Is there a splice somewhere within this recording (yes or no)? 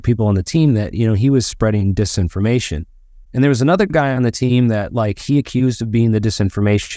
no